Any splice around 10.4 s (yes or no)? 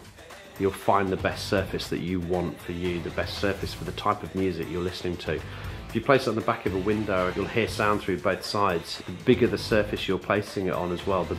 no